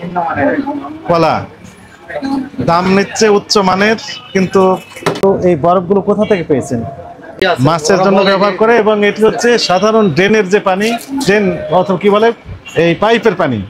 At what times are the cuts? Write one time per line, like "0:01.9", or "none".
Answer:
0:05.2
0:07.4

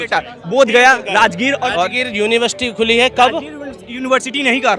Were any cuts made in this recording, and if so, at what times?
0:01.7

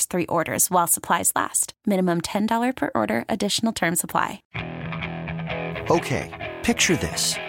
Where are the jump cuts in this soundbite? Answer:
0:04.5

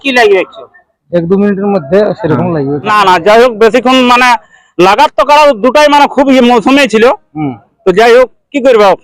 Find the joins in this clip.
0:02.9

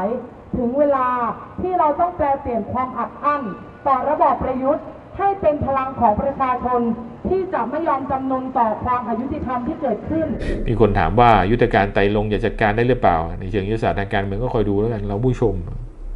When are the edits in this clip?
0:10.5

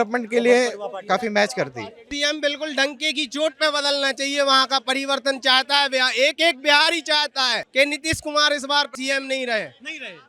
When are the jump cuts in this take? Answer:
0:02.1
0:07.6
0:08.9

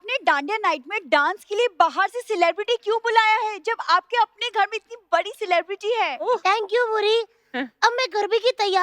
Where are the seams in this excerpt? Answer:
none

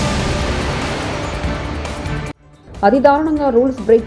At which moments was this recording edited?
0:02.3

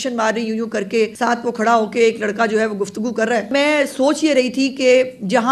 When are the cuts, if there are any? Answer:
0:01.1
0:03.5

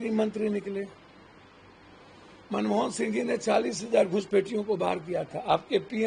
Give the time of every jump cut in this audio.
none

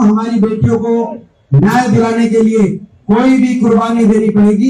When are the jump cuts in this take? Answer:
none

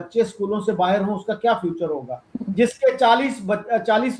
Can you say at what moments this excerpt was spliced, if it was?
none

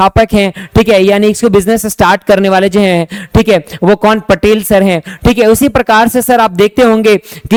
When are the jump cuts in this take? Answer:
none

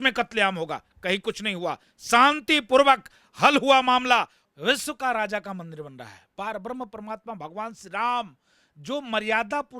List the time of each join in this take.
0:04.4

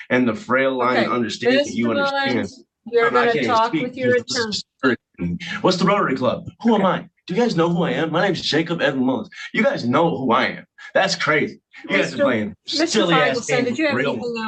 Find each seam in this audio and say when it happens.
none

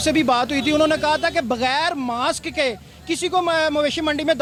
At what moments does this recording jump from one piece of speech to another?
none

